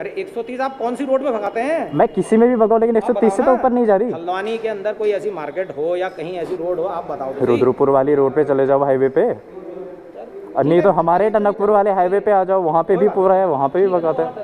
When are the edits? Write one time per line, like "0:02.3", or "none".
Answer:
none

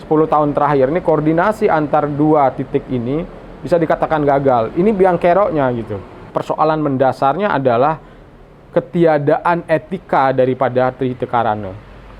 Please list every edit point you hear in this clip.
0:06.3

